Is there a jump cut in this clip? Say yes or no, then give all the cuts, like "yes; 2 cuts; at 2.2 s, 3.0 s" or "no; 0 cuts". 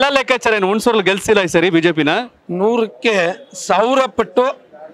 no; 0 cuts